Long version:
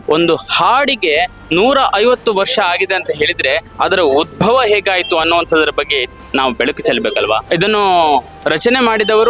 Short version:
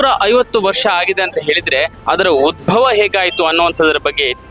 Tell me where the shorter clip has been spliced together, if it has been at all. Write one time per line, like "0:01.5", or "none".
none